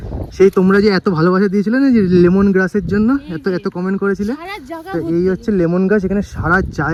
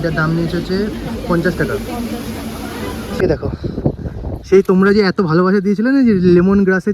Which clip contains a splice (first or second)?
second